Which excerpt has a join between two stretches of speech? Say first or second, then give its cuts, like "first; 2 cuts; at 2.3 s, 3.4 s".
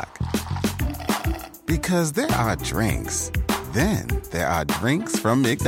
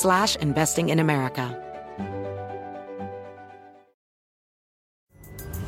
second; 1 cut; at 1.5 s